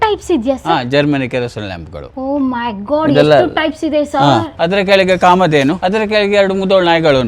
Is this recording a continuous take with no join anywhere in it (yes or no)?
no